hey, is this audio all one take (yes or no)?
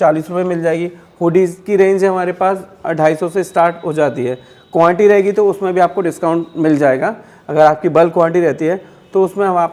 yes